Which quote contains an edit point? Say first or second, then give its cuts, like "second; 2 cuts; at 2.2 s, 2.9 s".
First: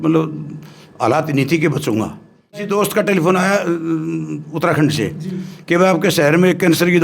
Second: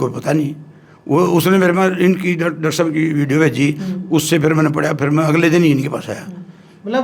first; 1 cut; at 2.6 s